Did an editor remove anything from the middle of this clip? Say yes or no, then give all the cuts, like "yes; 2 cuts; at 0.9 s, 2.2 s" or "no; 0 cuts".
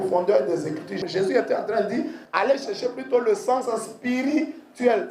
yes; 2 cuts; at 1.0 s, 2.2 s